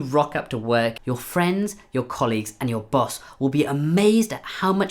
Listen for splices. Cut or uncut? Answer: cut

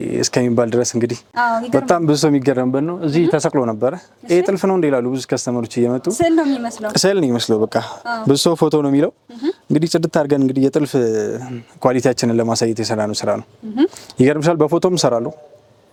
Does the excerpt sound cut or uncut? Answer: uncut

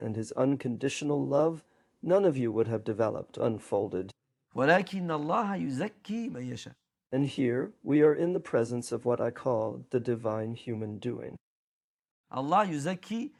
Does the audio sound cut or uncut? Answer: uncut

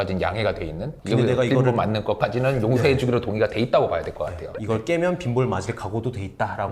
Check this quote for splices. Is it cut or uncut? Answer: cut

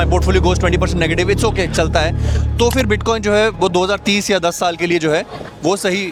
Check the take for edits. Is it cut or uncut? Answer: uncut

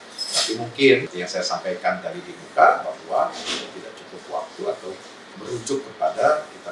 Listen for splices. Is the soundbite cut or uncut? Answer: cut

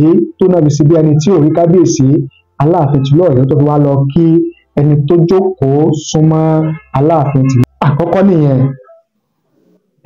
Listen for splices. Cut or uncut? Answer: cut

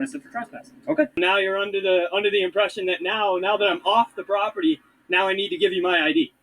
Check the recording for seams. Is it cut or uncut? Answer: cut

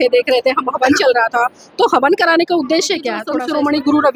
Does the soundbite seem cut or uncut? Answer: cut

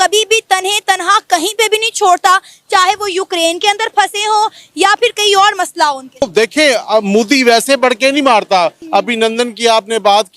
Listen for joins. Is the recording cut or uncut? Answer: cut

